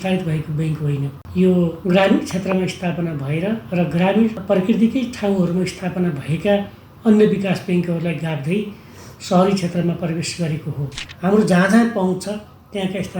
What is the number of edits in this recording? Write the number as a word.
four